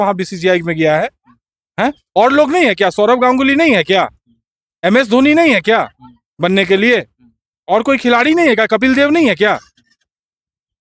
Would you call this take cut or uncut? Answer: uncut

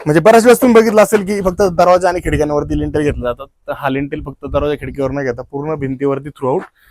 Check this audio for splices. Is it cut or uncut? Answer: uncut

